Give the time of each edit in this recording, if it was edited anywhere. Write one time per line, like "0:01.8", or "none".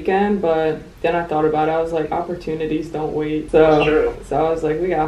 0:03.5
0:04.2